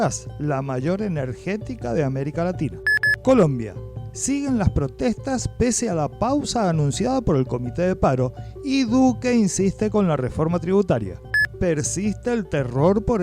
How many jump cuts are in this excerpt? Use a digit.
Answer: 2